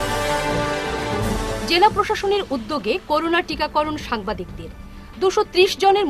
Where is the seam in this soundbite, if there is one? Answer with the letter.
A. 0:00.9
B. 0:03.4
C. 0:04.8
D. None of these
A